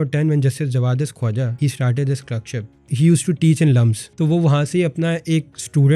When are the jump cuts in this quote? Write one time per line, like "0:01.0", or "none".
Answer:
0:01.5
0:02.9
0:04.0